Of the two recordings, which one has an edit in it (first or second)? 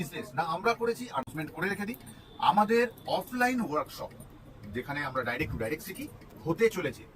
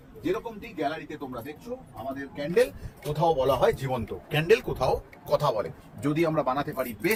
first